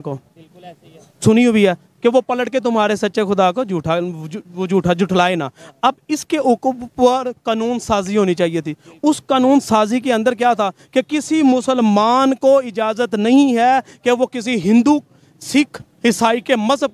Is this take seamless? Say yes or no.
yes